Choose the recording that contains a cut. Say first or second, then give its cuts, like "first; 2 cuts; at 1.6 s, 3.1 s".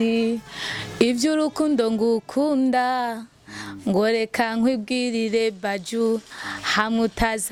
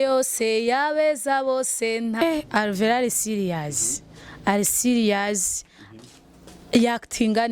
second; 1 cut; at 2.2 s